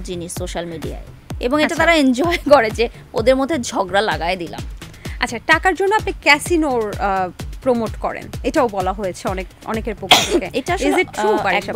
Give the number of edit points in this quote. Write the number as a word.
zero